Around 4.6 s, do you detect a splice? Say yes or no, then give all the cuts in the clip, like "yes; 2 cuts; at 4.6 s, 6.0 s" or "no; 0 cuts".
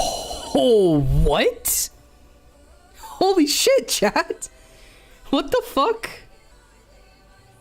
no; 1 cut; at 6.5 s